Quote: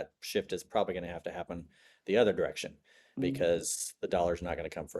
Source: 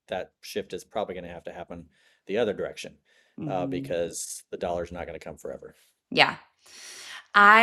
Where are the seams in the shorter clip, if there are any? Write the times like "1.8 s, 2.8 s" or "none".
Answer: 3.2 s